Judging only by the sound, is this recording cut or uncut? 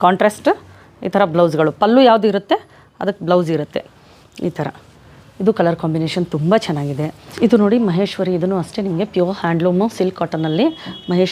uncut